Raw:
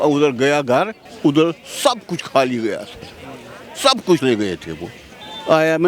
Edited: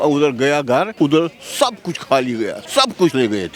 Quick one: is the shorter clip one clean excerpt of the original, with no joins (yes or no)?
no